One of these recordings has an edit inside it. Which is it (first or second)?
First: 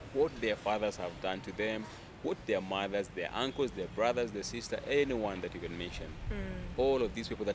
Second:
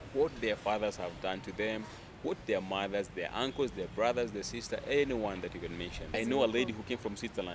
second